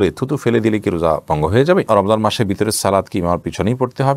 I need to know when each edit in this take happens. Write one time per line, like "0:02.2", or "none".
0:01.9